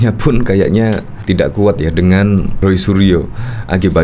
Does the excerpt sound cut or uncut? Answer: cut